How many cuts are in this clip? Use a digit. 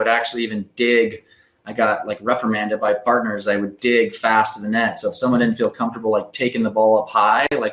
0